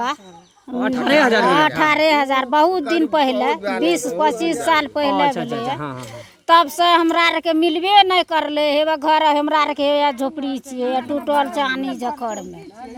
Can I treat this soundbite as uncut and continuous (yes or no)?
yes